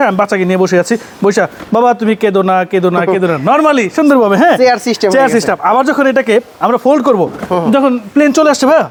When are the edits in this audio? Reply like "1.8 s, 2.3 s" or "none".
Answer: none